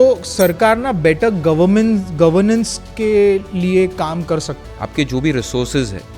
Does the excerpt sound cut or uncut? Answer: cut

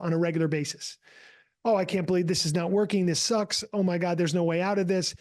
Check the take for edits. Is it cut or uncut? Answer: uncut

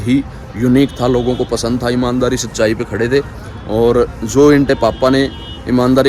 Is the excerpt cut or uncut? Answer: uncut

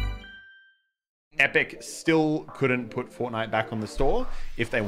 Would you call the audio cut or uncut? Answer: cut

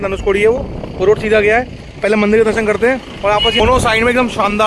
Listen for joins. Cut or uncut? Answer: cut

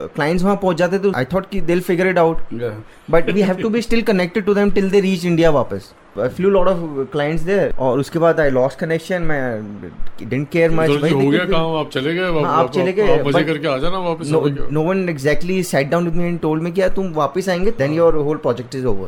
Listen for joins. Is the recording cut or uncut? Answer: cut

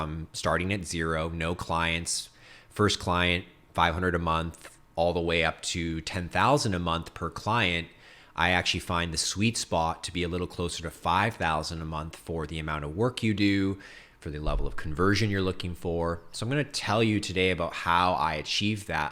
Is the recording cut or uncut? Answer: uncut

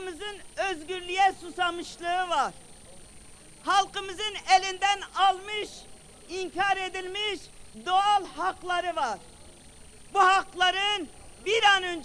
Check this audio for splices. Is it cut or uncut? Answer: uncut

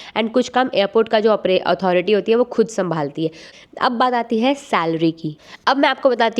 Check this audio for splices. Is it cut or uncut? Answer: cut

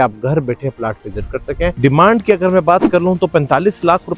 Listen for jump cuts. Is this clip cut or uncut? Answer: cut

